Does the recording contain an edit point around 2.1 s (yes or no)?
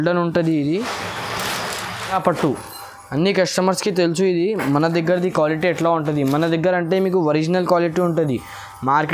yes